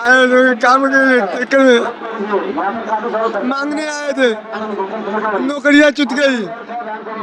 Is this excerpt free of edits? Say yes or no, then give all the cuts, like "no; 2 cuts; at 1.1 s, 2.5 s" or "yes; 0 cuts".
yes; 0 cuts